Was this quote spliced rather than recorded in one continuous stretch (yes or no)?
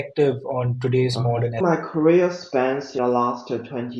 yes